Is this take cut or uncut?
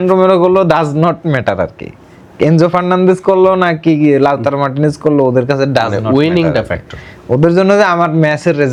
uncut